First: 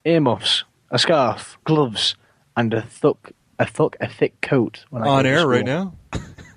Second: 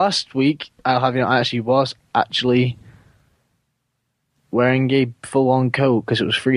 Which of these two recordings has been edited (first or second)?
first